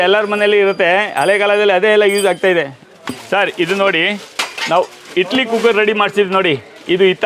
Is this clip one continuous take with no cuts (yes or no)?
yes